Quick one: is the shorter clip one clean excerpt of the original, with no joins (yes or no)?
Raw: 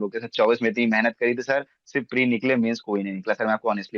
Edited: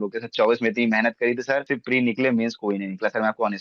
no